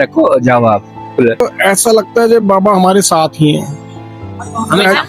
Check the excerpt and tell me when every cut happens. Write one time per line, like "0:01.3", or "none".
0:01.4